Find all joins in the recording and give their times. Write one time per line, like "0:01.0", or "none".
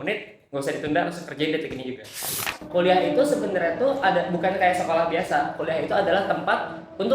0:02.5